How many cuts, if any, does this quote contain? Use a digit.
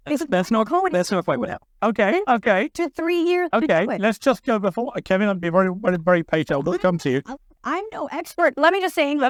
0